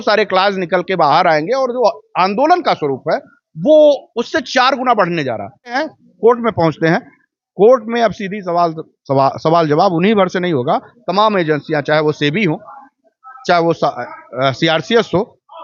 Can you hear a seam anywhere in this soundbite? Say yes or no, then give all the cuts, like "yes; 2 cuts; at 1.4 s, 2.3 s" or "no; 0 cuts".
yes; 1 cut; at 5.8 s